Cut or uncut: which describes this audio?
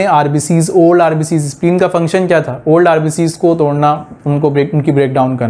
uncut